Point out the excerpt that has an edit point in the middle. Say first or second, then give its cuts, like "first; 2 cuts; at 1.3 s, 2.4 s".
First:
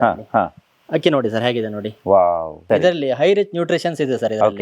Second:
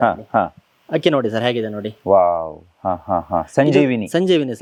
first; 1 cut; at 2.6 s